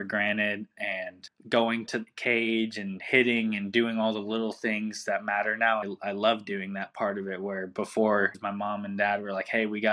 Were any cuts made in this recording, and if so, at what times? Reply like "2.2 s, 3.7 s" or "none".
1.3 s, 5.9 s, 8.4 s